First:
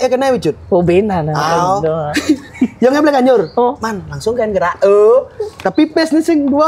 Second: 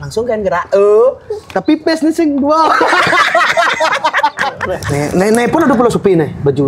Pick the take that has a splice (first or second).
second